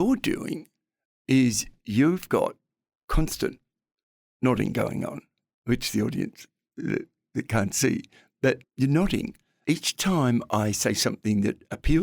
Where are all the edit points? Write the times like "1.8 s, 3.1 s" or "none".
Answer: 8.7 s, 9.4 s